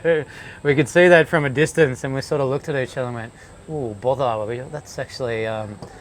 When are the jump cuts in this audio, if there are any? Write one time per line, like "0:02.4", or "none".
none